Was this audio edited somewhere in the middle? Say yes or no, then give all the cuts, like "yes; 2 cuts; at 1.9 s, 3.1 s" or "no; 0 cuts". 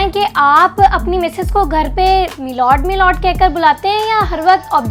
no; 0 cuts